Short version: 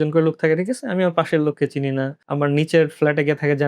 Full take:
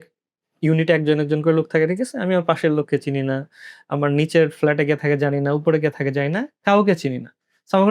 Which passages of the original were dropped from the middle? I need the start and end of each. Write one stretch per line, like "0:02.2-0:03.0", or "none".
0:03.5-0:03.8